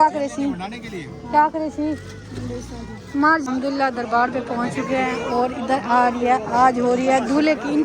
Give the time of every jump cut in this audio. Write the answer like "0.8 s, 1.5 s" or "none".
3.5 s